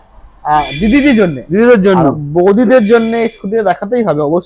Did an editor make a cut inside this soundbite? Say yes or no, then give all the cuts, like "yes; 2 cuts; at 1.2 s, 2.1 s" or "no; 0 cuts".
no; 0 cuts